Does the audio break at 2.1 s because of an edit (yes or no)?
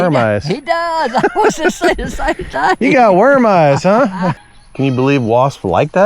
no